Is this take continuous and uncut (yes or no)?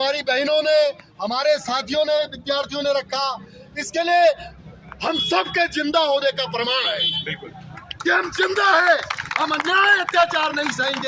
yes